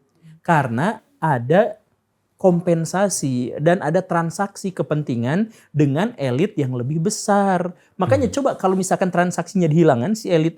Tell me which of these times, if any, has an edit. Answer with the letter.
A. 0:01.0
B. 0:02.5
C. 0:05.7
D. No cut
D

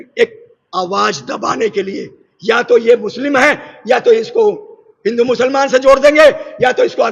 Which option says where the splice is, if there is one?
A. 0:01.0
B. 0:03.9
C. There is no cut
C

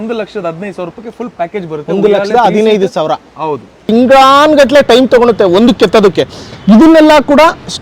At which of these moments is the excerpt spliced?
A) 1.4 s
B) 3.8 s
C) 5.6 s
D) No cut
B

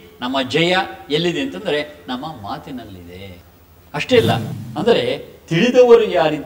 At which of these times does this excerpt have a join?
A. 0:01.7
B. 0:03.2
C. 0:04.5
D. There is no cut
C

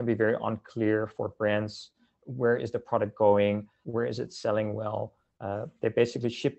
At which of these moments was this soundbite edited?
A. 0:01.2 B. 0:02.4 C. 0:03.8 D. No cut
C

